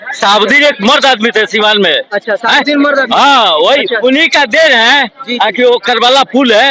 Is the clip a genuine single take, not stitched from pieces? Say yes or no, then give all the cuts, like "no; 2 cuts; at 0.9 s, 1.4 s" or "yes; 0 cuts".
yes; 0 cuts